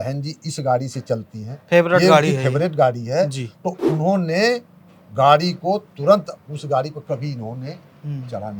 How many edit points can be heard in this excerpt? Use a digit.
0